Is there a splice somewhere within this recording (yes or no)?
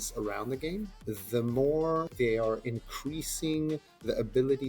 yes